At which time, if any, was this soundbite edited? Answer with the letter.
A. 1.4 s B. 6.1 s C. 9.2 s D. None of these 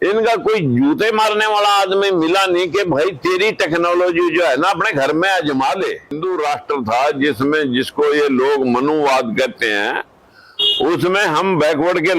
B